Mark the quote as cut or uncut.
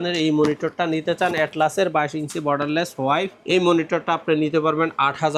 uncut